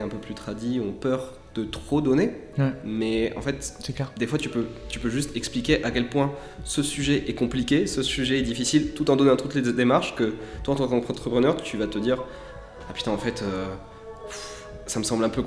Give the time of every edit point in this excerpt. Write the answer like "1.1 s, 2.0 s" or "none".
none